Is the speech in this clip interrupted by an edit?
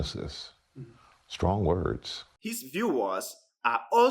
yes; 1 cut; at 2.4 s

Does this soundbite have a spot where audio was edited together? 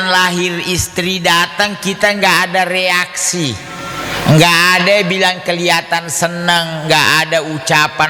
no; 0 cuts

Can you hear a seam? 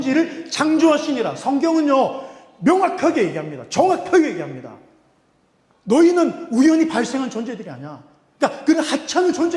no; 0 cuts

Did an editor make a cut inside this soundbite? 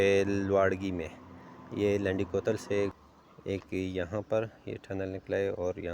yes; 1 cut; at 2.9 s

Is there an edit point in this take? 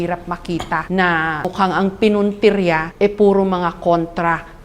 yes; 3 cuts; at 0.8 s, 1.5 s, 2.9 s

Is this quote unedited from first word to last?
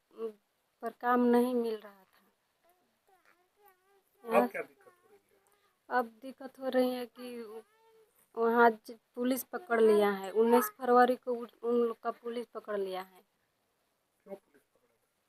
yes; 0 cuts

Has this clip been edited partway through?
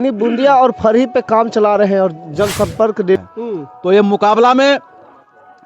yes; 1 cut; at 3.2 s

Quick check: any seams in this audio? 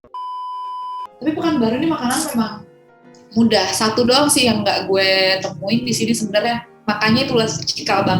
yes; 1 cut; at 1.1 s

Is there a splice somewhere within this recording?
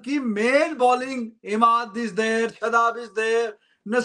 no; 0 cuts

